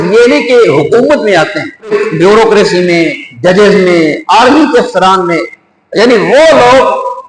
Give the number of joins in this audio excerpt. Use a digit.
1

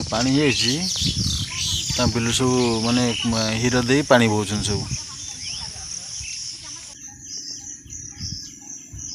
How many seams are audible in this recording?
1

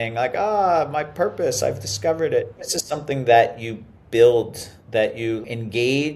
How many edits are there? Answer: 2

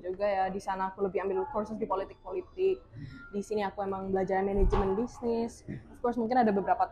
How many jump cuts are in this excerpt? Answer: 0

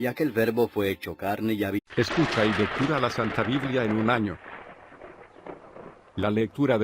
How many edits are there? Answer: 0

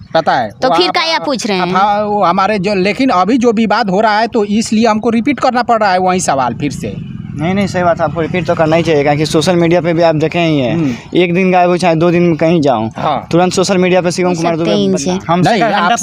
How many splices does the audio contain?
1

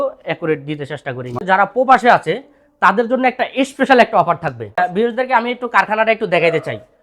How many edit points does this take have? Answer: 2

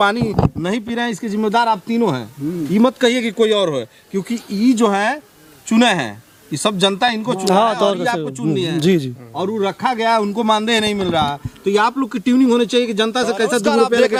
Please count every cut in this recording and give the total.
0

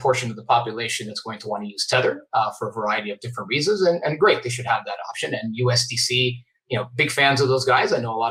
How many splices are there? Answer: 0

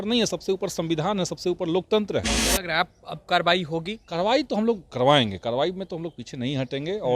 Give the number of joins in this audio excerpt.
0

